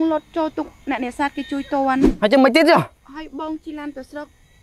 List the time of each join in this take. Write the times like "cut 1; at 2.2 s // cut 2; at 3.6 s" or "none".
cut 1; at 2.2 s // cut 2; at 3.0 s